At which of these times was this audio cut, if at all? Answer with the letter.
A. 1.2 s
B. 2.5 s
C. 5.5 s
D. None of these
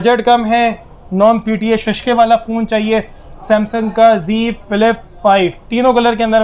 D